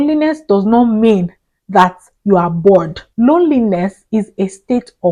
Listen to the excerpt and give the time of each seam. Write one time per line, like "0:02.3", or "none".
0:03.0